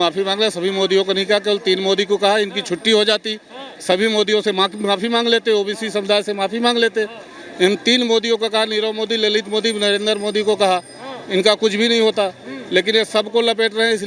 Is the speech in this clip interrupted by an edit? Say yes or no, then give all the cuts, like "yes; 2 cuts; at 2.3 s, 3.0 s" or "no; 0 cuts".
no; 0 cuts